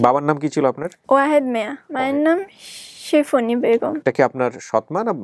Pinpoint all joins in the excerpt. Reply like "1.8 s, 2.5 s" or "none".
1.0 s, 1.8 s, 4.0 s